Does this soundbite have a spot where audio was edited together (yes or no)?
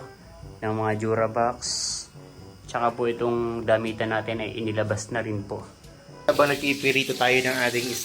yes